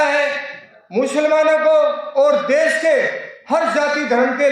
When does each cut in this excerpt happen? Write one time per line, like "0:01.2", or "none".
none